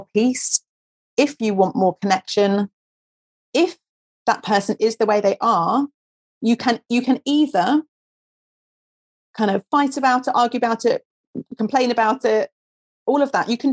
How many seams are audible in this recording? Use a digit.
0